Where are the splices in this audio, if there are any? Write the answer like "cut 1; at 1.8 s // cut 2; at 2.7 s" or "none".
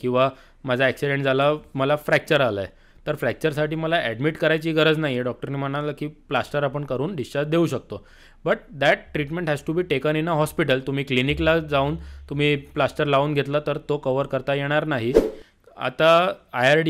cut 1; at 15.4 s